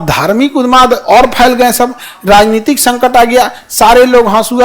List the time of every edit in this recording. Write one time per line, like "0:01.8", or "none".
none